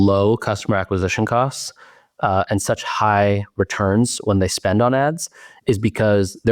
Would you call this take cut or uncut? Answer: uncut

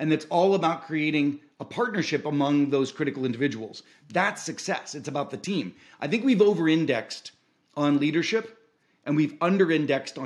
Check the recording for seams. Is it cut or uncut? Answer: uncut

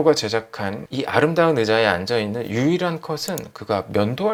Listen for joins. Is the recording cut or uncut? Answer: uncut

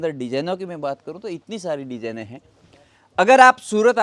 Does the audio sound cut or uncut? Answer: uncut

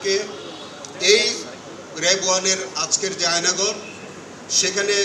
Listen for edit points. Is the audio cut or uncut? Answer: uncut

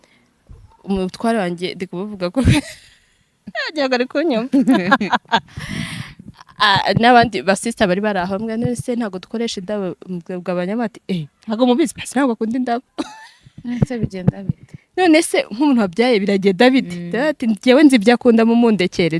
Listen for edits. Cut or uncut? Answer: uncut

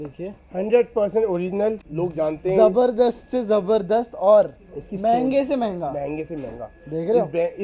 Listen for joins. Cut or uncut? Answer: cut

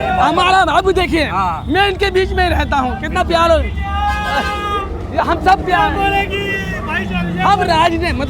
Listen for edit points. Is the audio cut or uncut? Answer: uncut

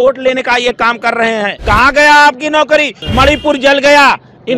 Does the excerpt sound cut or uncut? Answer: cut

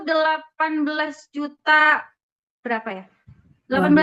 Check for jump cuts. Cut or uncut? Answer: uncut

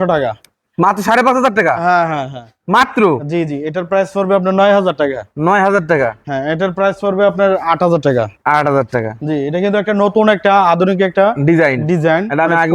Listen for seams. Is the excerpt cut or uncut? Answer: uncut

